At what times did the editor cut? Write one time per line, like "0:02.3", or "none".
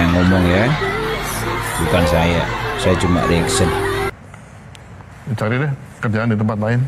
0:04.1